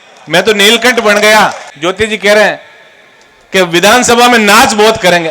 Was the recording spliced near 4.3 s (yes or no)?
no